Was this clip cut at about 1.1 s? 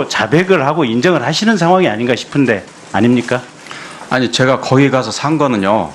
no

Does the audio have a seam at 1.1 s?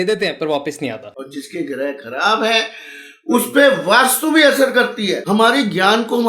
yes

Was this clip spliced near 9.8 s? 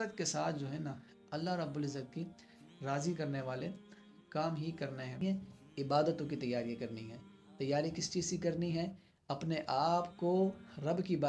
no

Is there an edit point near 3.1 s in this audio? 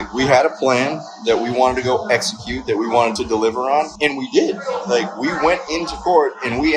yes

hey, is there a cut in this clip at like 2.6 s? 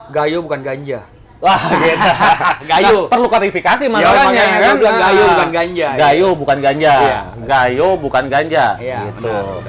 no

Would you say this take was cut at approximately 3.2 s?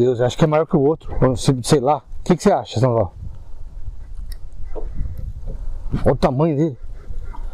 no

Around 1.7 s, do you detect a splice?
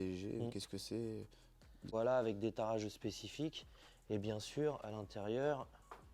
yes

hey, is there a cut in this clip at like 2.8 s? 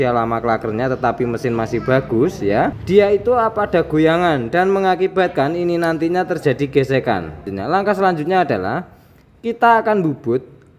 yes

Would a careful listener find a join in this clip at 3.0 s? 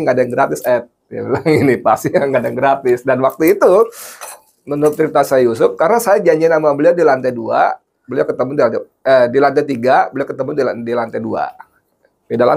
no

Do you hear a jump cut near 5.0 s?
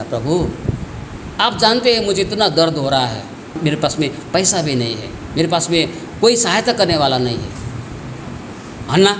no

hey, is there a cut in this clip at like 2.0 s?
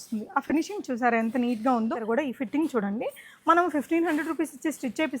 yes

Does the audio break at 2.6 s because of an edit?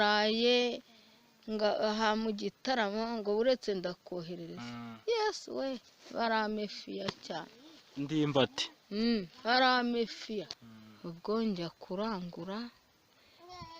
no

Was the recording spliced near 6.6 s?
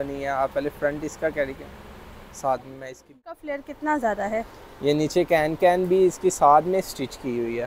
no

